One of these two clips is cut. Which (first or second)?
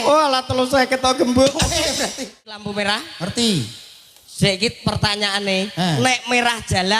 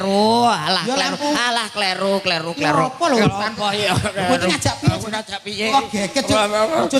first